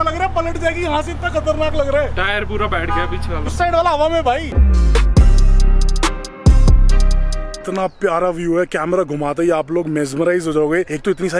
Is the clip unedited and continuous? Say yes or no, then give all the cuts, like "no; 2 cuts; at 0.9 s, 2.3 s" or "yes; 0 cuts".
no; 2 cuts; at 4.5 s, 7.6 s